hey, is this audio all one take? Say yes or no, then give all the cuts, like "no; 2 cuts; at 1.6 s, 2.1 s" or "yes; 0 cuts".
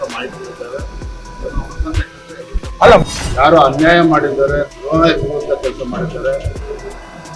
no; 1 cut; at 3.0 s